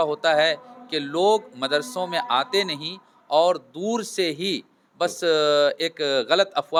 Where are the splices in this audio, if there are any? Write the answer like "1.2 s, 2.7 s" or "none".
none